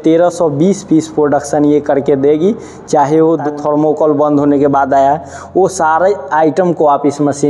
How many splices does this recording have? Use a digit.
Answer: 1